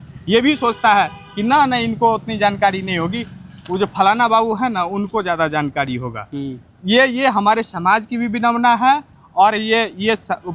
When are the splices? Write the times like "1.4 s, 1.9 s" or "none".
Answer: none